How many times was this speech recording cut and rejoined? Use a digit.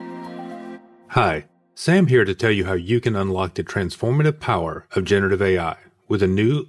1